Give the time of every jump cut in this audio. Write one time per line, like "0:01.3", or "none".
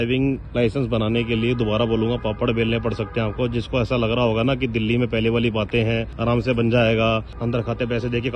0:06.1
0:07.4